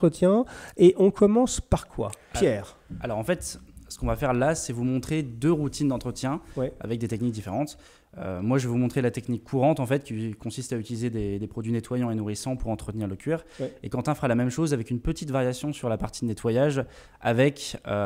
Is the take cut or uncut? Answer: uncut